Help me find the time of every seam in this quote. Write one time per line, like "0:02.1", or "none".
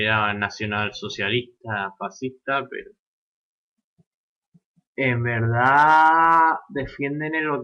0:01.9